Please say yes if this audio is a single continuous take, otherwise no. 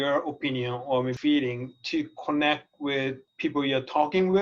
no